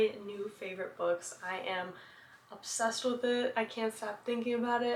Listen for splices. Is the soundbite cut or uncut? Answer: uncut